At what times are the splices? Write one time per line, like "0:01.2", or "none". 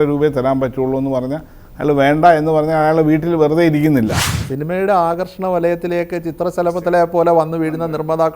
0:04.2

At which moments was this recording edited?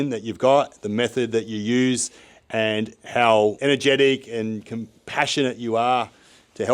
0:03.6

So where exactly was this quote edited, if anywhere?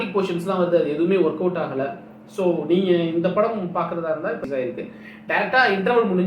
0:04.4

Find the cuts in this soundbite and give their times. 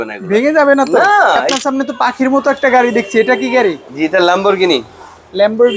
0:01.5

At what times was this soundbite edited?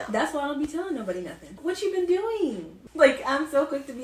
0:01.6
0:02.8

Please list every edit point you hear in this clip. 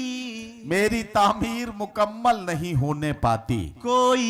none

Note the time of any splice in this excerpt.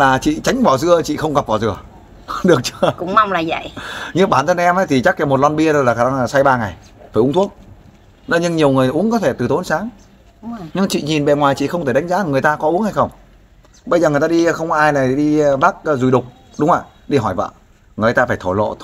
none

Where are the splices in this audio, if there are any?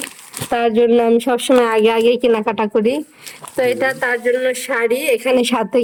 none

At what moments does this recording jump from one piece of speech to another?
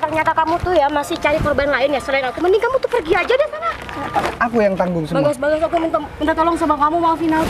0:04.3

